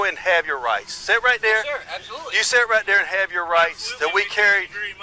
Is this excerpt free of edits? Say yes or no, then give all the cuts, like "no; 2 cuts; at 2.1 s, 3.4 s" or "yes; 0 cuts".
yes; 0 cuts